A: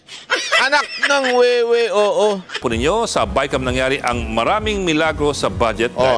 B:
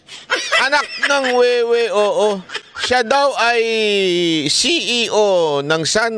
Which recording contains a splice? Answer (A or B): A